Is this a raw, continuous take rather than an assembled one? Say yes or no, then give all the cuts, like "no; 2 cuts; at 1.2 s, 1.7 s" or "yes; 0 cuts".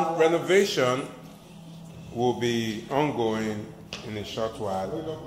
yes; 0 cuts